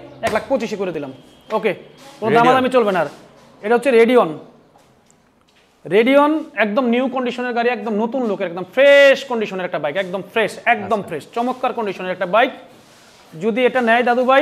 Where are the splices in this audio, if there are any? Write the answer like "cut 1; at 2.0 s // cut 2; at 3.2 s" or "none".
none